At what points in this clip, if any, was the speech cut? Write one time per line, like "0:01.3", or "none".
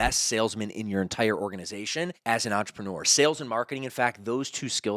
0:02.2